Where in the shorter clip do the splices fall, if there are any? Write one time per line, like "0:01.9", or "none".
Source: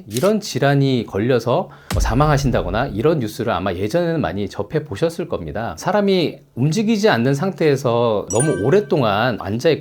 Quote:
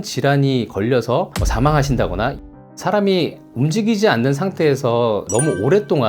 0:01.4
0:02.4